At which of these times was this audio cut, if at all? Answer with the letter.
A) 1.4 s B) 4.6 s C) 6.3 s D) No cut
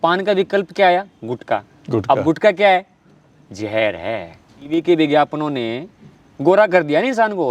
B